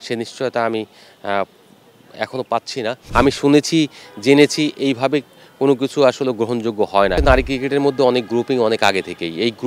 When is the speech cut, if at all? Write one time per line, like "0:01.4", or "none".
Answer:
0:03.0
0:07.2